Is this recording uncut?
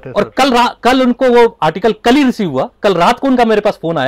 no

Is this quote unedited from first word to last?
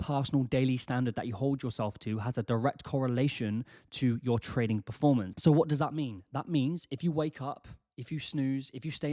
yes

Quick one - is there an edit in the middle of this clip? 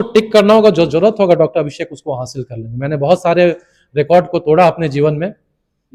no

